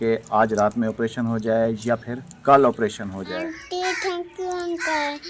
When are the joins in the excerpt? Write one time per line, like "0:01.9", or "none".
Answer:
0:03.4